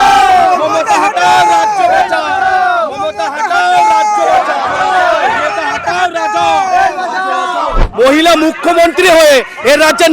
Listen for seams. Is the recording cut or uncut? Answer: cut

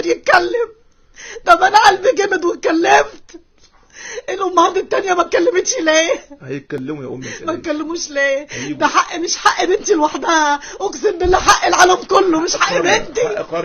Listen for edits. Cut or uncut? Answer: uncut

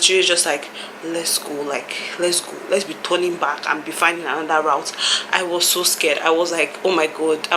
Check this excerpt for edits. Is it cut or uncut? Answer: uncut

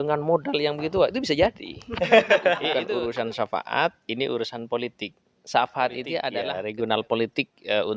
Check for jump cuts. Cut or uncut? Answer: cut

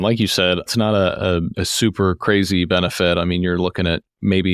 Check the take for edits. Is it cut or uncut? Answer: uncut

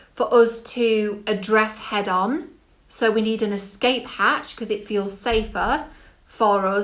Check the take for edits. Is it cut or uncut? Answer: uncut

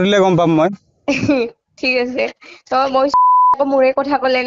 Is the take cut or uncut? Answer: cut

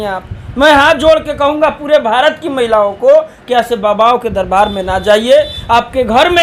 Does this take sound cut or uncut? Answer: uncut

